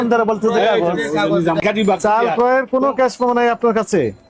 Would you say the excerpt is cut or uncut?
cut